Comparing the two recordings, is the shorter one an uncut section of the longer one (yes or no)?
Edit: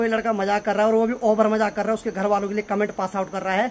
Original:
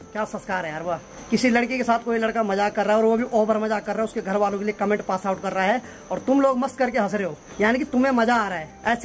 yes